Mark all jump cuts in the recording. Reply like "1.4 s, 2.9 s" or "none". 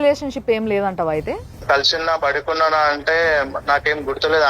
1.6 s